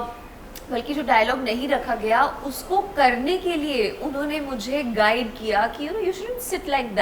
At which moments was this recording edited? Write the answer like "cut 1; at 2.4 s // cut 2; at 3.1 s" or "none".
none

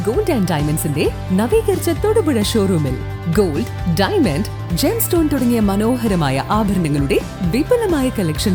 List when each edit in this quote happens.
none

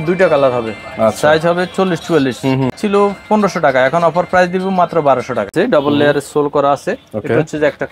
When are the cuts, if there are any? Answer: cut 1; at 2.8 s // cut 2; at 5.5 s

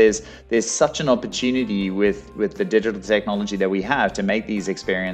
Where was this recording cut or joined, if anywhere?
none

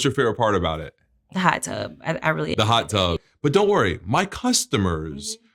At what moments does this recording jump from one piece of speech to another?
cut 1; at 3.2 s

